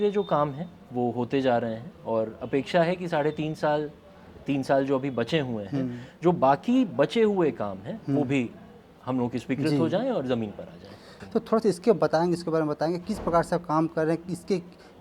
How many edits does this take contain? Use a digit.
1